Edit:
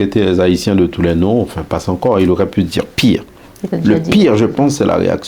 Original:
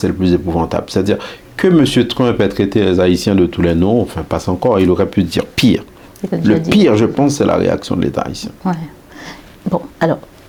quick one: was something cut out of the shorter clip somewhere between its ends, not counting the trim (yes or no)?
no